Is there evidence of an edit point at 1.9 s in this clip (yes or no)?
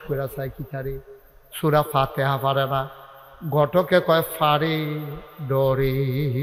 no